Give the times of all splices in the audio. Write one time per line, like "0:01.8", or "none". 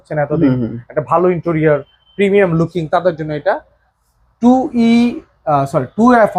none